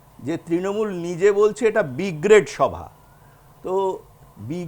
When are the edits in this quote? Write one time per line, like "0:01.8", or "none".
none